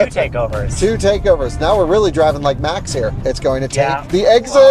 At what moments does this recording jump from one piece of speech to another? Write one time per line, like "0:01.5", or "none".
0:03.2